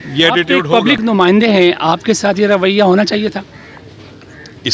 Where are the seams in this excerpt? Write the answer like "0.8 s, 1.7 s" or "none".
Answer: 1.0 s